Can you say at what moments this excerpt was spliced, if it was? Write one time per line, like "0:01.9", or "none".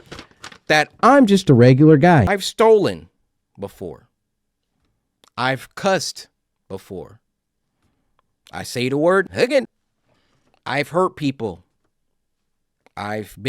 0:02.4